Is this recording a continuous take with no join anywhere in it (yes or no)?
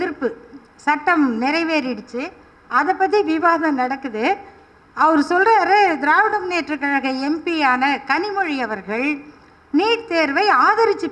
yes